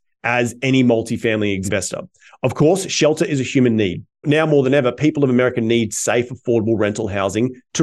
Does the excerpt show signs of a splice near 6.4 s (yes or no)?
no